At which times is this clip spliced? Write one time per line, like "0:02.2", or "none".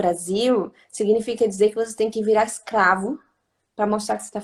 none

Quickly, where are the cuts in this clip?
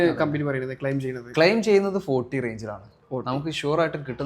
none

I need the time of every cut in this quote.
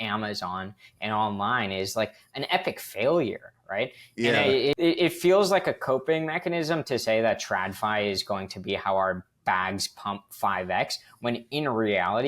0:04.8

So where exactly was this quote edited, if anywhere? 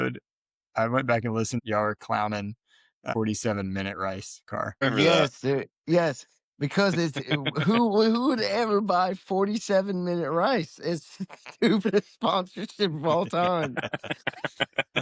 0:01.6
0:03.1
0:04.8

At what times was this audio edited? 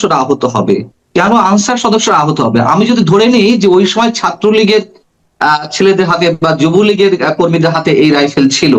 none

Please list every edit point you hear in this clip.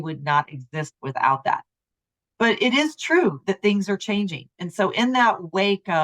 0:04.5

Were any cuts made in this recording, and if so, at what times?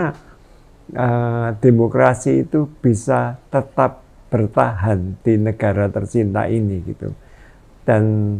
none

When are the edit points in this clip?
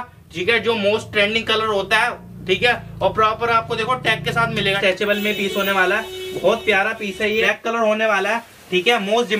0:04.8
0:07.5

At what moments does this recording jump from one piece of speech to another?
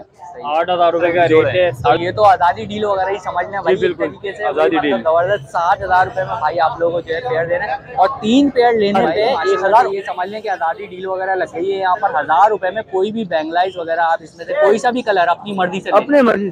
0:02.0
0:09.9

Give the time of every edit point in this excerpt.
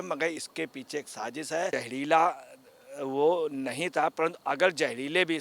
0:01.7

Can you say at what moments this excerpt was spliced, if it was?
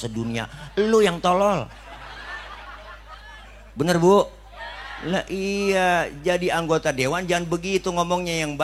none

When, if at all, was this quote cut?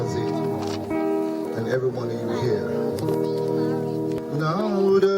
0:04.2

